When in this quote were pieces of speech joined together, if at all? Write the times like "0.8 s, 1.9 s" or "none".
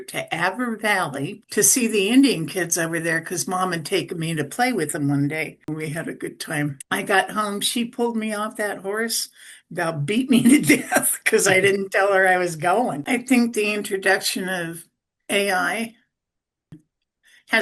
1.4 s, 5.7 s, 13.0 s